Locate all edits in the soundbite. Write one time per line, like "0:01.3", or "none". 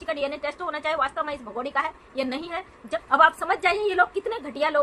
0:03.0